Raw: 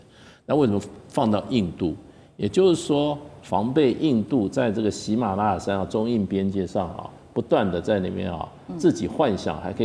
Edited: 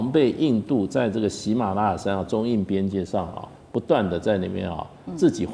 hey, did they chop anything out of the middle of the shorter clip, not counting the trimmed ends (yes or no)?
no